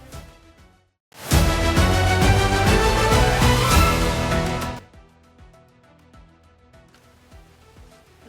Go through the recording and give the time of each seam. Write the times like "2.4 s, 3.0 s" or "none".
4.8 s, 7.0 s